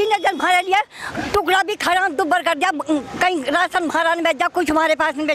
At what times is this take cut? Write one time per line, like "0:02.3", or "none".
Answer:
none